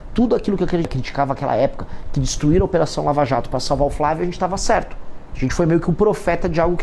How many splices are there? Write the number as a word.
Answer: one